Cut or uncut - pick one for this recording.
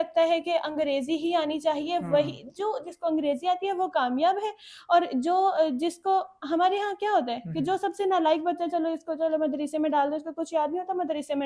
uncut